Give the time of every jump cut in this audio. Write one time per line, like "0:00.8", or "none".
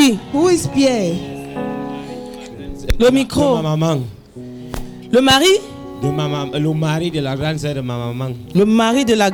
none